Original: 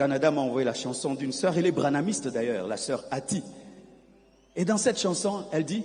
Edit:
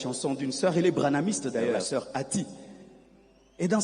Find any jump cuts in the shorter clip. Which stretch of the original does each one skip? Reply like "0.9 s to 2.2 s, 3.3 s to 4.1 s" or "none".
2.6 s to 2.8 s